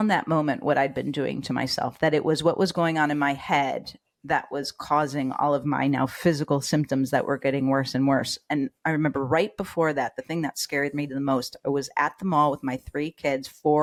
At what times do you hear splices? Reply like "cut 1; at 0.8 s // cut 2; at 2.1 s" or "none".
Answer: none